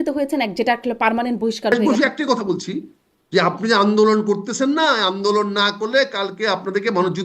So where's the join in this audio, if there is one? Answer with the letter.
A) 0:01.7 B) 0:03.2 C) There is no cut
A